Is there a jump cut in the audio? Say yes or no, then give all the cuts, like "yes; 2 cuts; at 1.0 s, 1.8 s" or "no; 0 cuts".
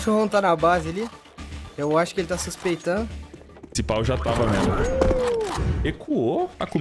no; 0 cuts